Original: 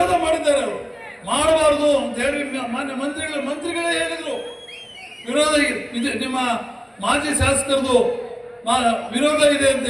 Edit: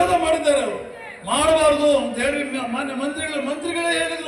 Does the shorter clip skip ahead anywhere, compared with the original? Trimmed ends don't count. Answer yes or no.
no